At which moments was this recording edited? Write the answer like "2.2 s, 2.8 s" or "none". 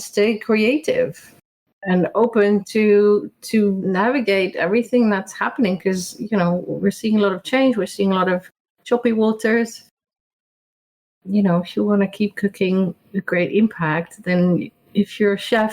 1.7 s, 3.8 s